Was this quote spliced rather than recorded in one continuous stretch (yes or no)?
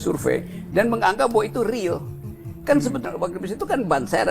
yes